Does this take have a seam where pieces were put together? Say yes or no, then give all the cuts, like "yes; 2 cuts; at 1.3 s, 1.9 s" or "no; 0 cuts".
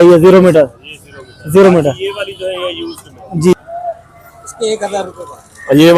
yes; 1 cut; at 3.5 s